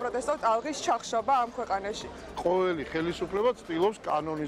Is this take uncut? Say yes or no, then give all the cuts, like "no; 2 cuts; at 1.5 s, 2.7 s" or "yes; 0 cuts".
no; 1 cut; at 2.1 s